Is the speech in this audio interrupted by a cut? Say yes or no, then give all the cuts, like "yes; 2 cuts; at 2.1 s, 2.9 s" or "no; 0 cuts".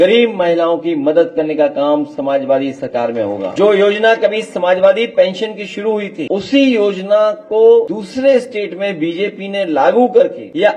no; 0 cuts